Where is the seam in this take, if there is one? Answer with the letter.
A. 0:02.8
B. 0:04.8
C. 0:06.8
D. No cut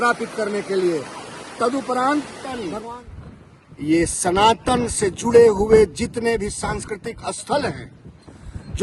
A